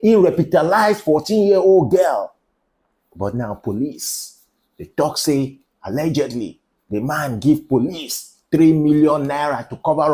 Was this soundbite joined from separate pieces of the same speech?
no; 0 cuts

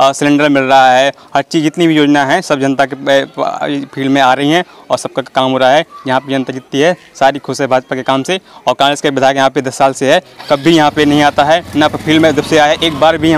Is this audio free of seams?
yes; 0 cuts

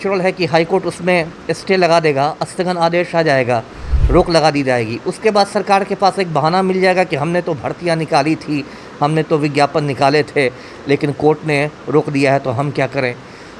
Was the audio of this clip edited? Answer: no; 0 cuts

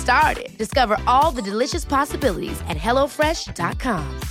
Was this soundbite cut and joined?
no; 0 cuts

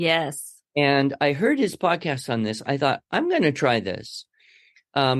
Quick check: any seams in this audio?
no; 0 cuts

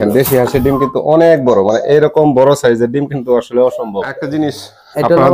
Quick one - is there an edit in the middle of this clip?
yes; 1 cut; at 4.2 s

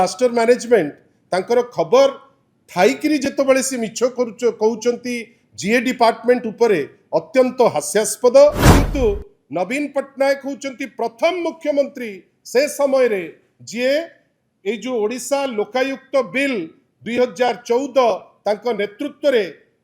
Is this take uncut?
no; 1 cut; at 8.7 s

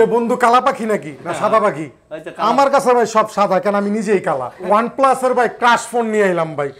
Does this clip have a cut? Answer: yes; 1 cut; at 4.6 s

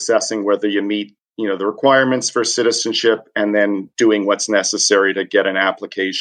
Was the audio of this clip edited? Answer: no; 0 cuts

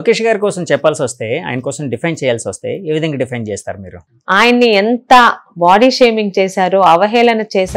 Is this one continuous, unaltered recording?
no; 1 cut; at 4.0 s

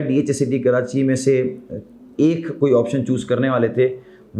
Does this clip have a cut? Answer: no; 0 cuts

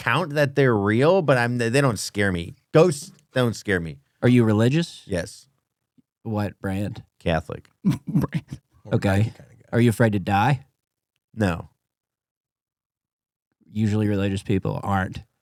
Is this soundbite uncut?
yes; 0 cuts

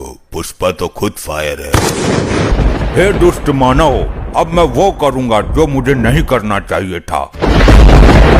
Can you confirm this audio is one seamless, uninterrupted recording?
no; 2 cuts; at 2.5 s, 7.3 s

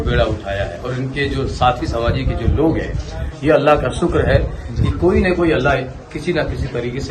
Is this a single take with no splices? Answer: yes; 0 cuts

